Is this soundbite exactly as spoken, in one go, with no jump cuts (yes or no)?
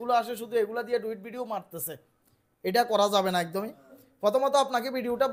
yes